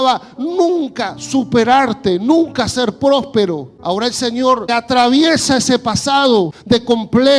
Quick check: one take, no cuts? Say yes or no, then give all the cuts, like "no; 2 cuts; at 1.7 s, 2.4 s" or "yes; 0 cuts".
no; 3 cuts; at 3.7 s, 4.7 s, 6.6 s